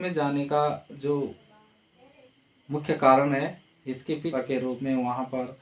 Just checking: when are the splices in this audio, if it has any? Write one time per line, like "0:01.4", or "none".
0:04.2